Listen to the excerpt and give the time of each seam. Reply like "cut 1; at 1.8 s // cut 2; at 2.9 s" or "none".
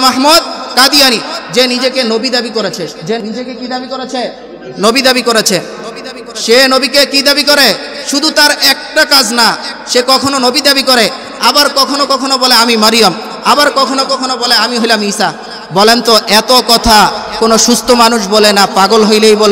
cut 1; at 3.2 s